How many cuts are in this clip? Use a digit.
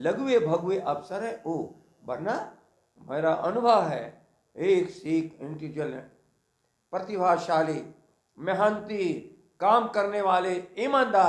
0